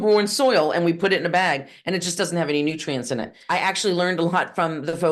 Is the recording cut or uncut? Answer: cut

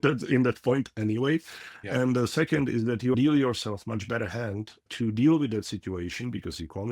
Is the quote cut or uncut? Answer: cut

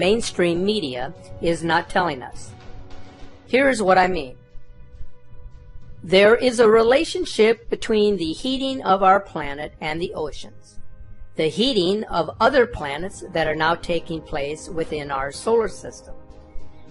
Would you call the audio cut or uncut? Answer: uncut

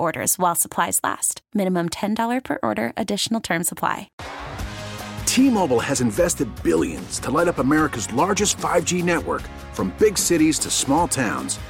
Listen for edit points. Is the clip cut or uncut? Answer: cut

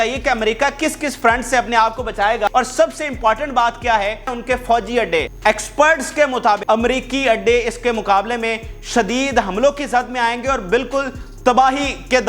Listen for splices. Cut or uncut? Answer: cut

